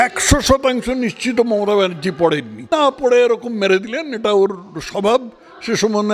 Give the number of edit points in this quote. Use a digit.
1